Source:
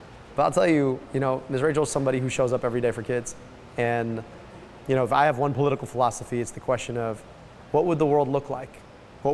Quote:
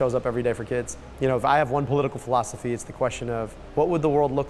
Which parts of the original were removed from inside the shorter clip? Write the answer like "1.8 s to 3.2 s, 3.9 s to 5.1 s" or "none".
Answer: 3.4 s to 4.7 s, 7.3 s to 7.5 s